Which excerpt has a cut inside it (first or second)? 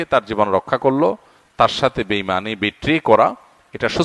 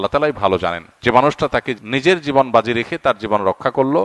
second